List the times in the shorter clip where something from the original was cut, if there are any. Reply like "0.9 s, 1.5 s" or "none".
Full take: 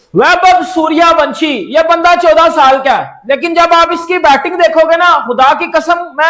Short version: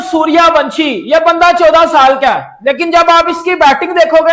none